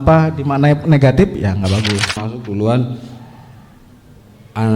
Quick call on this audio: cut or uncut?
cut